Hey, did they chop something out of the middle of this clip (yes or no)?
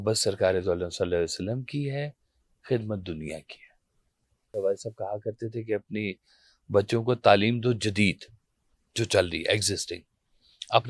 yes